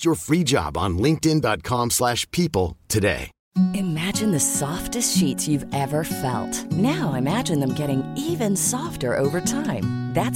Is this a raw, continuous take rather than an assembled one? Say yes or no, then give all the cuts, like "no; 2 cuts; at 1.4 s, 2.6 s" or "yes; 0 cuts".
no; 1 cut; at 3.3 s